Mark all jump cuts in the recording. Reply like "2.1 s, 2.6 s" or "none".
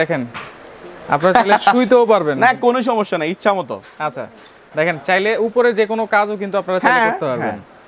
none